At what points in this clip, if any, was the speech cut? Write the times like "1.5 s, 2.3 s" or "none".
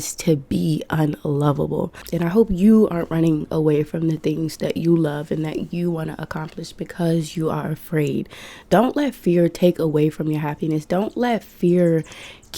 2.0 s